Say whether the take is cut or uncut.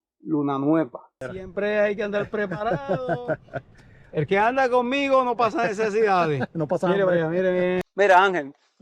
cut